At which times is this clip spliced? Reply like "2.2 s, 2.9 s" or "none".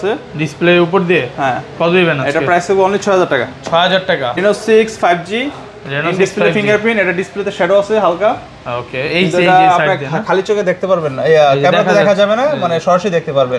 4.4 s